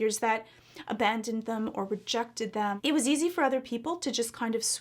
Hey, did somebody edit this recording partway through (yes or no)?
yes